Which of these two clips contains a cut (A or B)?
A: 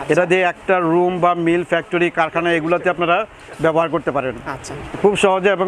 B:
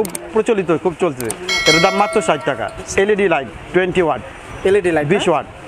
B